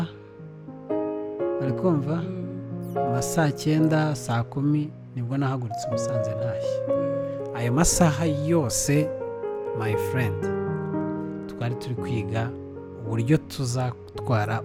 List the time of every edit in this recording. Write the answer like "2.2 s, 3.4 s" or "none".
none